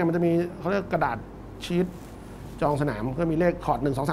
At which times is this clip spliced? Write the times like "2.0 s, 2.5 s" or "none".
none

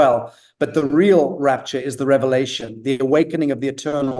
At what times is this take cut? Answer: 3.0 s

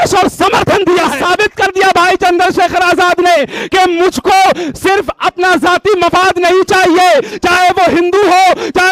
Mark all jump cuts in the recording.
1.1 s

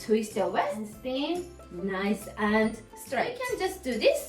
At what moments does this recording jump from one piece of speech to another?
0.9 s, 3.4 s

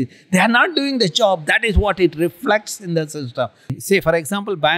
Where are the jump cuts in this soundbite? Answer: 3.7 s

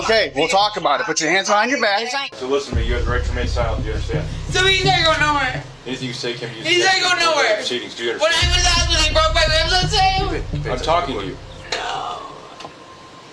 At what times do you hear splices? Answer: 2.2 s

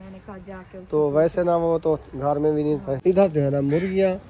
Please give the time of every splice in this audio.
3.0 s

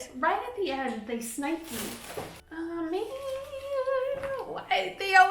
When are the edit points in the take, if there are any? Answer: 2.4 s

